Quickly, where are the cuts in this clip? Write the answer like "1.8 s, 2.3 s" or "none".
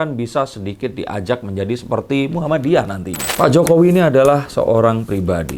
3.2 s